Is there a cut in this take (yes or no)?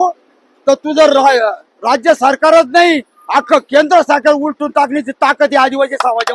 no